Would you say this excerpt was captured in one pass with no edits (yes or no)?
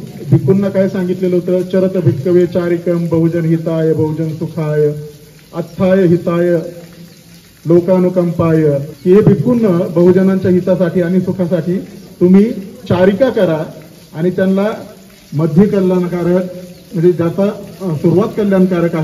no